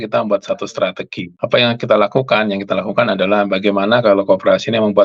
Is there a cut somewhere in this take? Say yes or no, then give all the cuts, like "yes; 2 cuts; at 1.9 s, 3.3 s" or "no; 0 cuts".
no; 0 cuts